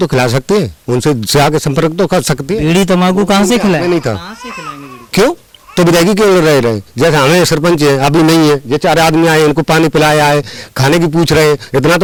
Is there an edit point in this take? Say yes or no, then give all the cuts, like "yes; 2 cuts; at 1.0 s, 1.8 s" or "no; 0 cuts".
no; 0 cuts